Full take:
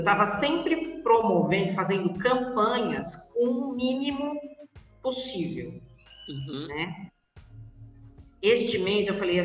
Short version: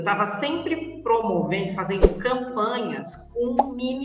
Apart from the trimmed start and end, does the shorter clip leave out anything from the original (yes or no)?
no